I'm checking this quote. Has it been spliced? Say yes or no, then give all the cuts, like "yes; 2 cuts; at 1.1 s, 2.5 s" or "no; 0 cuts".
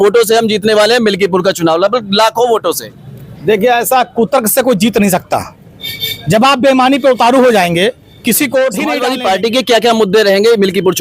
yes; 1 cut; at 9.0 s